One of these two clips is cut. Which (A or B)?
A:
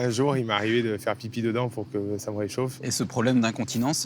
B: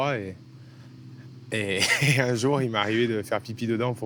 A